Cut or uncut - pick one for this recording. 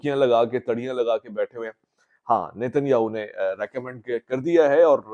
uncut